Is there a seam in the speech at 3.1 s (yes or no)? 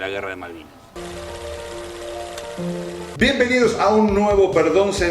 yes